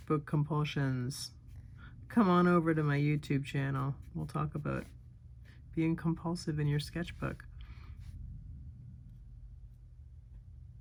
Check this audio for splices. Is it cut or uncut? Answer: uncut